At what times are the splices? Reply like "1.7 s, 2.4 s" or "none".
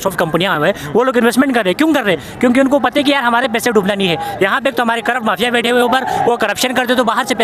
none